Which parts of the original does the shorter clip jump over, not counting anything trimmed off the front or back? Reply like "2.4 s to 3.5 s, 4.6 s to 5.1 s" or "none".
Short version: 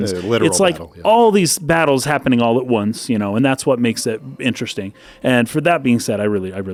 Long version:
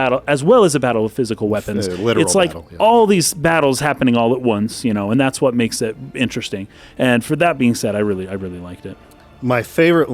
none